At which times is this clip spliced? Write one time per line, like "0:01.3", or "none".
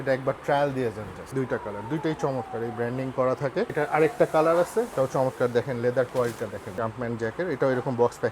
0:01.2
0:03.7
0:04.9
0:06.7

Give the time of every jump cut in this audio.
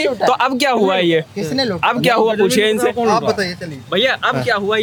none

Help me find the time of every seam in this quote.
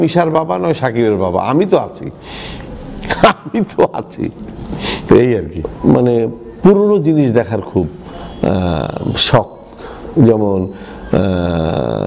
0:05.5

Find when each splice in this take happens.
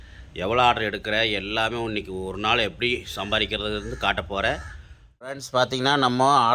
0:05.4

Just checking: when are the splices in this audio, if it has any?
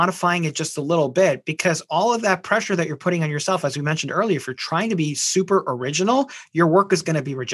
none

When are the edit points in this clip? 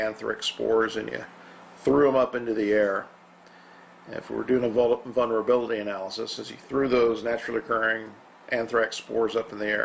0:04.1

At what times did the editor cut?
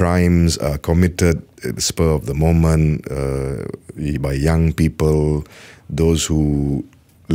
none

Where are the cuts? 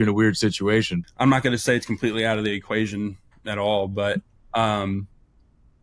0:00.9

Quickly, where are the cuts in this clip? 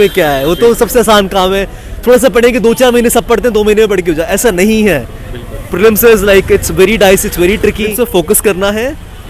0:07.9

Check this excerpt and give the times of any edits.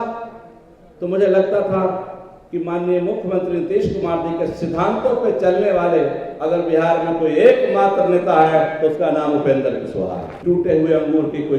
0:10.3

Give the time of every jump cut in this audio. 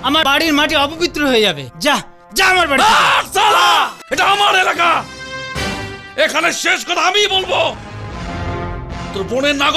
0:04.0

